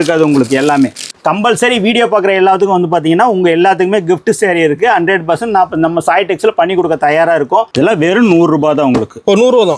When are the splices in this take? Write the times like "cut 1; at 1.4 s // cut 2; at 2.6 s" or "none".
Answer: cut 1; at 1.1 s // cut 2; at 7.7 s